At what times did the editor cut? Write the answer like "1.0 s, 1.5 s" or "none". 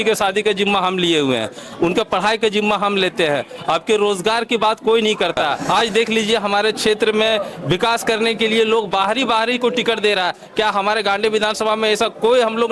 5.6 s